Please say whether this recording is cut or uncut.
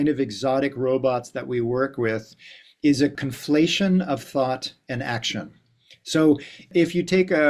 cut